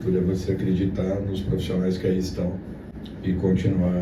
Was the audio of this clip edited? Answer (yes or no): no